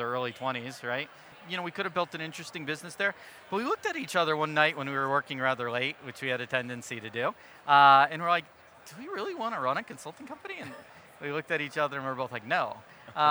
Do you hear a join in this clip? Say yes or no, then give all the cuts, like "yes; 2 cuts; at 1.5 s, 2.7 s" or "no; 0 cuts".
yes; 1 cut; at 1.3 s